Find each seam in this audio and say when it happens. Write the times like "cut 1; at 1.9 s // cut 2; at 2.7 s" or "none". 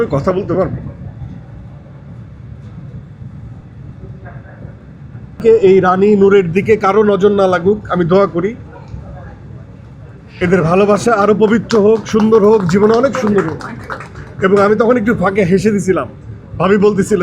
cut 1; at 5.4 s

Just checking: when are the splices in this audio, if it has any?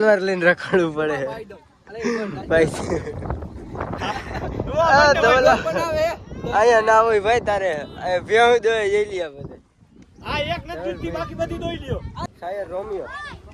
cut 1; at 12.2 s

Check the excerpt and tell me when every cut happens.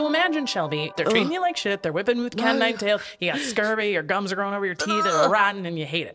cut 1; at 0.9 s

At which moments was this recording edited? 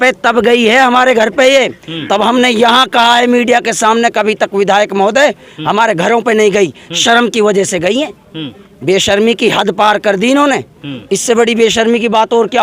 none

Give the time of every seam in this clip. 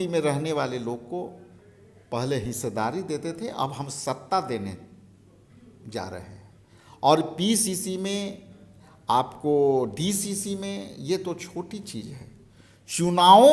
none

